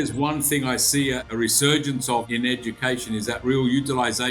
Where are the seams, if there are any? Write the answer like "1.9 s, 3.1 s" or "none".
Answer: 1.3 s, 2.3 s